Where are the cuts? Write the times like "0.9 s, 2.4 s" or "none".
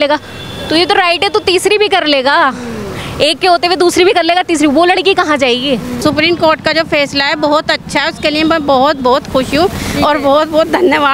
6.0 s